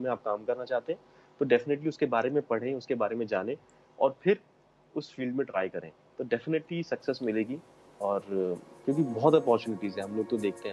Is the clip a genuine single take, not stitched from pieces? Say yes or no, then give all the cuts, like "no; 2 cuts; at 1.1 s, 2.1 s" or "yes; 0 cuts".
yes; 0 cuts